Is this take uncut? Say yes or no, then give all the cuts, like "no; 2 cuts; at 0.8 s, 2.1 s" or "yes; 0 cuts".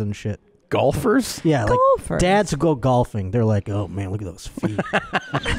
yes; 0 cuts